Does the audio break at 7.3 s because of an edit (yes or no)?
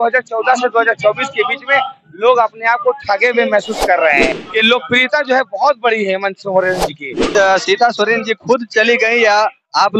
yes